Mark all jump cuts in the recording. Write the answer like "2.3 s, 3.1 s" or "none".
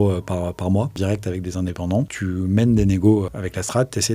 1.0 s, 2.1 s, 3.3 s